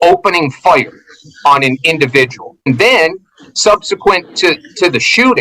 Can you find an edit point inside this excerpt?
yes; 1 cut; at 2.7 s

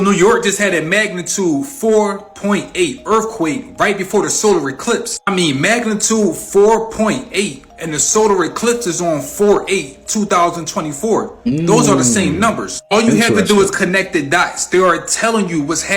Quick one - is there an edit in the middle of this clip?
no; 0 cuts

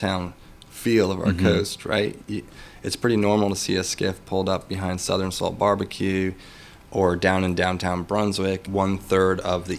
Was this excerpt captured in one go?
no; 1 cut; at 8.6 s

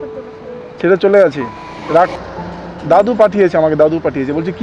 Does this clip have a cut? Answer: yes; 1 cut; at 2.1 s

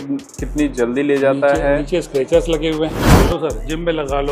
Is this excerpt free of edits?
no; 1 cut; at 3.0 s

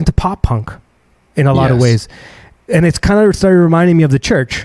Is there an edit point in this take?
no; 0 cuts

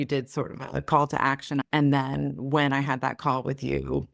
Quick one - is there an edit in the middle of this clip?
yes; 1 cut; at 1.7 s

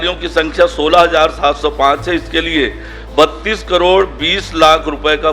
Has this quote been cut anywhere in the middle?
no; 0 cuts

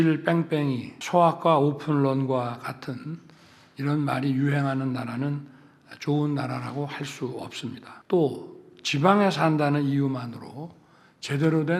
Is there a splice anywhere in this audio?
yes; 2 cuts; at 0.9 s, 7.9 s

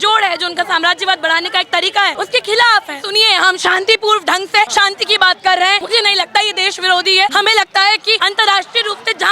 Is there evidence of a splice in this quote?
yes; 6 cuts; at 2.1 s, 3.0 s, 4.7 s, 5.8 s, 7.3 s, 8.2 s

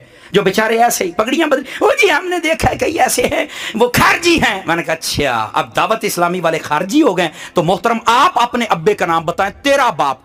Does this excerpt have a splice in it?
no; 0 cuts

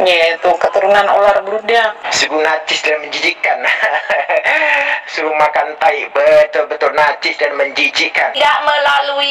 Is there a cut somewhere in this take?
yes; 2 cuts; at 2.0 s, 8.3 s

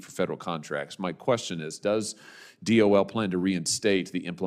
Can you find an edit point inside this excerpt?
no; 0 cuts

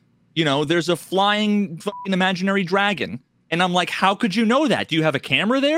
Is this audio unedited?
yes; 0 cuts

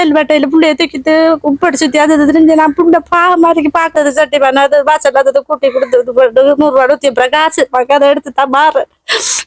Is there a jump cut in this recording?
yes; 1 cut; at 3.9 s

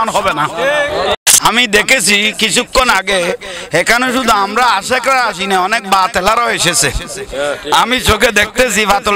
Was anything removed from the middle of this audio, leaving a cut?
yes; 1 cut; at 1.2 s

